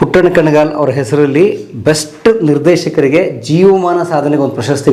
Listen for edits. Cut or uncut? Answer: uncut